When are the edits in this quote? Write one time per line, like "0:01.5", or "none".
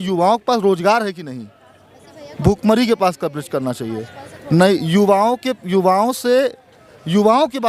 none

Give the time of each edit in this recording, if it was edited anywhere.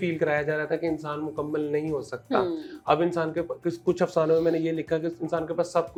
none

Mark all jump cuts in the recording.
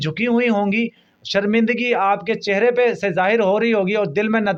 none

